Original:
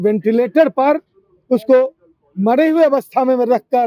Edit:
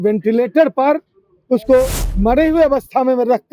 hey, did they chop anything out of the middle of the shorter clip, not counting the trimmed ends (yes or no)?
yes